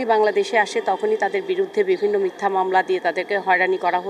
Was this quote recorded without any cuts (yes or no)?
yes